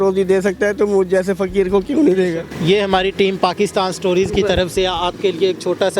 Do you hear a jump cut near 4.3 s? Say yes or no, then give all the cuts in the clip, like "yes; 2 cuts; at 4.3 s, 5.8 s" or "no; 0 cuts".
no; 1 cut; at 2.5 s